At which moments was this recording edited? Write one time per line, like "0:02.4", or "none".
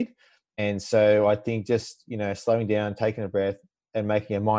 none